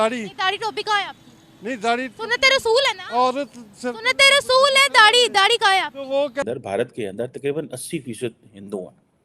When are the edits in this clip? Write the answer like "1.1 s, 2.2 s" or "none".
6.4 s

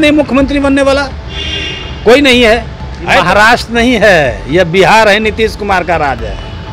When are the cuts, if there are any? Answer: 3.2 s

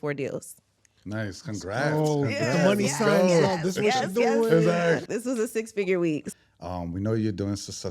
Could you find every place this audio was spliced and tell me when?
5.0 s, 6.3 s

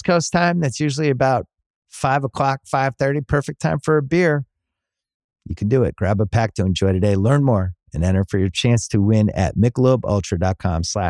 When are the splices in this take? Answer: none

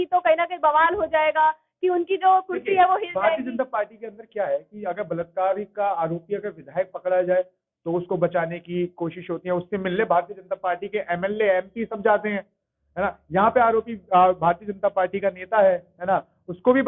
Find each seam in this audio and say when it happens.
none

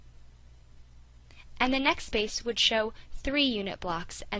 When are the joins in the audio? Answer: 3.3 s

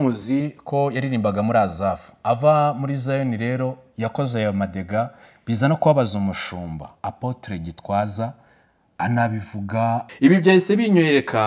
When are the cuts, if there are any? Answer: 10.1 s

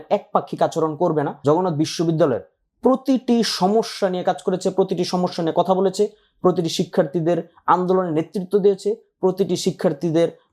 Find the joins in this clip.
1.3 s

